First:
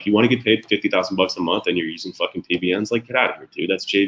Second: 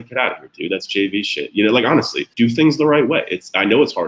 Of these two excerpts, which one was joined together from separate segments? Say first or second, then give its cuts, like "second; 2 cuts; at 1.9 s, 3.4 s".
second; 1 cut; at 2.3 s